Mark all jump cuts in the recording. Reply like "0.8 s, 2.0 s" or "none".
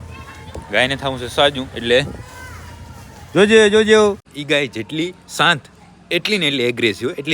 4.3 s